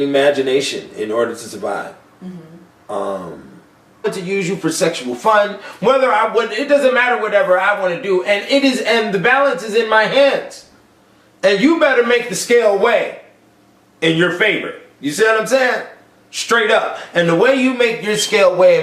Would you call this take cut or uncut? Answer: uncut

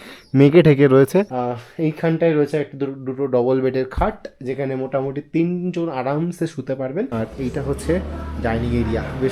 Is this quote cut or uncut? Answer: cut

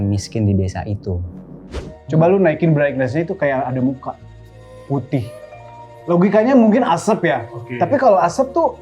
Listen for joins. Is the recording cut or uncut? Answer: cut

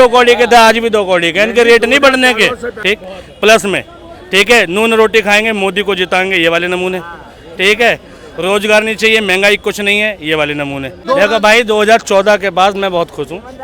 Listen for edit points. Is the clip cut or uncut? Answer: cut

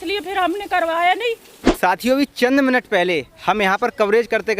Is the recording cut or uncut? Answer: cut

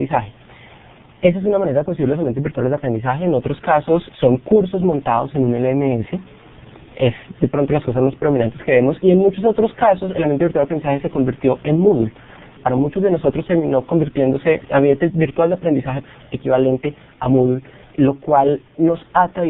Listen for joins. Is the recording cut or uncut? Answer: cut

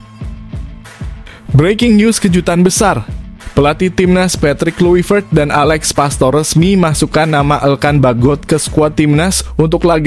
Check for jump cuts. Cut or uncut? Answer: cut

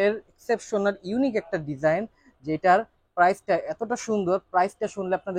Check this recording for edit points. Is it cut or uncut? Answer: uncut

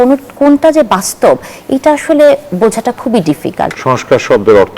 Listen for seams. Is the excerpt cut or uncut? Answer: cut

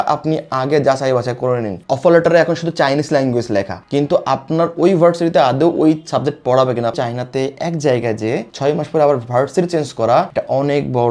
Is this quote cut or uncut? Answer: cut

